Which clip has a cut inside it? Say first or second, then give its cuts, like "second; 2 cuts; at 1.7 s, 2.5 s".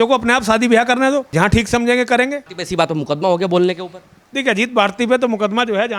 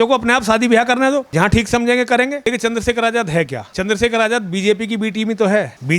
second; 1 cut; at 2.4 s